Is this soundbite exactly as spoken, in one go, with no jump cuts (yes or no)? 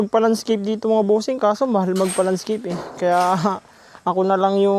yes